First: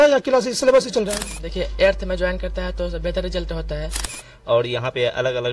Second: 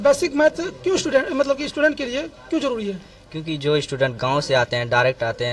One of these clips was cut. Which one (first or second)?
first